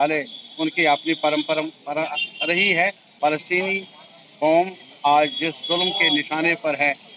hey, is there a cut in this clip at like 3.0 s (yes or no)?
yes